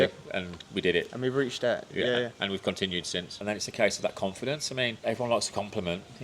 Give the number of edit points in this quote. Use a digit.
2